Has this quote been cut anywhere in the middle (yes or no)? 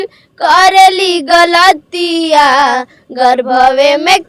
no